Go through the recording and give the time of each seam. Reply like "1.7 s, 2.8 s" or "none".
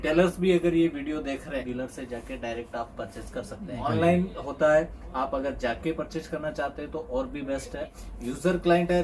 1.6 s, 3.8 s, 8.0 s

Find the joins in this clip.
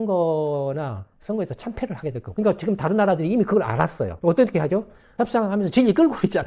5.1 s

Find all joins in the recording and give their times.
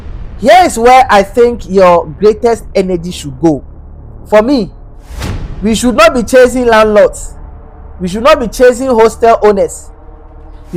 none

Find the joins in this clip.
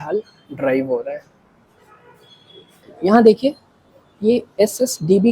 2.9 s

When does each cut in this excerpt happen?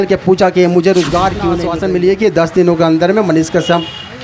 1.6 s

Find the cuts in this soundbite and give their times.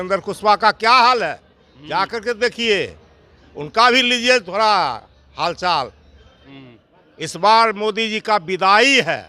6.4 s

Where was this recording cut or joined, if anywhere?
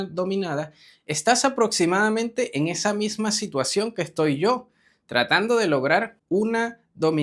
6.2 s

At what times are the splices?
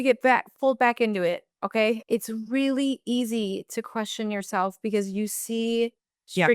2.0 s

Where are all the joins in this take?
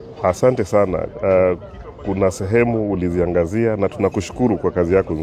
none

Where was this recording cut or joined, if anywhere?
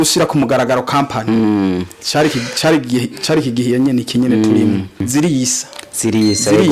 5.1 s

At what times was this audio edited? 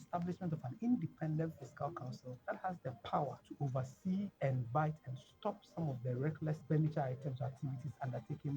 2.3 s, 3.4 s, 4.3 s, 6.6 s

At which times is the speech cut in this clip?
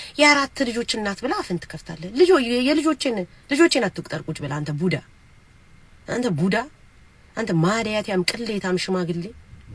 none

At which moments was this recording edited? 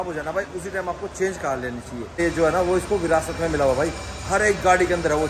2.1 s

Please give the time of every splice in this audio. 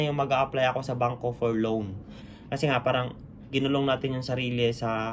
2.2 s

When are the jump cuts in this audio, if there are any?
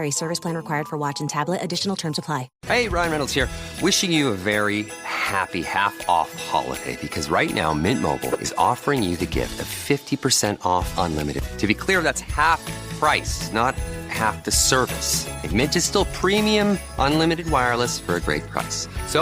2.5 s

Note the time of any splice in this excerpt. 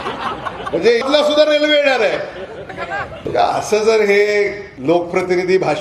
1.0 s, 3.1 s, 4.7 s

